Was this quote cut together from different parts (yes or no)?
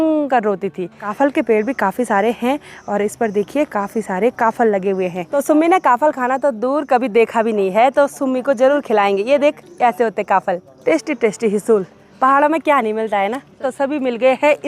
yes